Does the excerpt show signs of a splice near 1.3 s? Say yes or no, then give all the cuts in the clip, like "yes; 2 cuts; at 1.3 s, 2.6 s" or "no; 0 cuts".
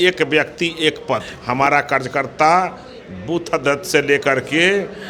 yes; 1 cut; at 1.3 s